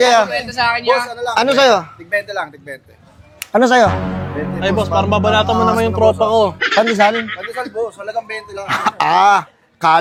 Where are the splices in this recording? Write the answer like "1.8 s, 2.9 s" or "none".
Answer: none